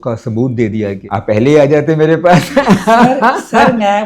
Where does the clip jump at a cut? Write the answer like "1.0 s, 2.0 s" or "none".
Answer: 1.0 s